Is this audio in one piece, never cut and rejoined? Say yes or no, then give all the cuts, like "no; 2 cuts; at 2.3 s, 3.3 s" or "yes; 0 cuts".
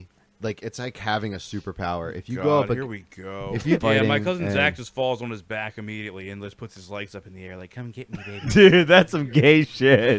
no; 2 cuts; at 3.8 s, 8.5 s